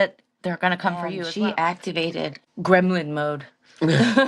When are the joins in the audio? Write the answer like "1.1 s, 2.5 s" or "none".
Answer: 1.2 s, 2.4 s